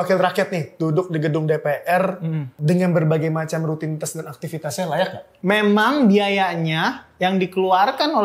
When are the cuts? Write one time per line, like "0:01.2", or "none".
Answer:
0:02.5
0:05.3